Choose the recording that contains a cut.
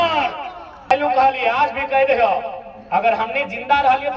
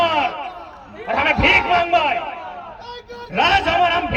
first; 1 cut; at 0.9 s

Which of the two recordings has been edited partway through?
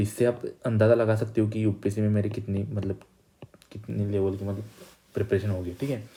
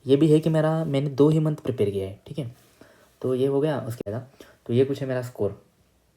second; 1 cut; at 4.0 s

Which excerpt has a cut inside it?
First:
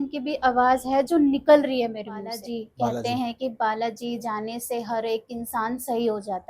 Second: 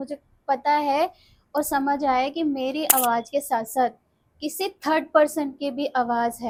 first; 1 cut; at 2.4 s

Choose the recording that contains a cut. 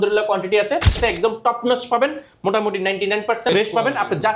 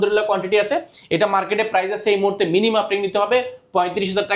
first; 2 cuts; at 0.9 s, 3.5 s

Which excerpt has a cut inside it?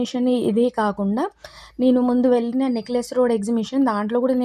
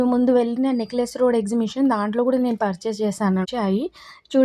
second; 1 cut; at 3.5 s

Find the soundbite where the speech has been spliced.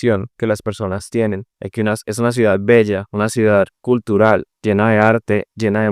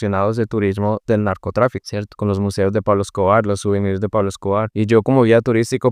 first; 2 cuts; at 3.0 s, 4.5 s

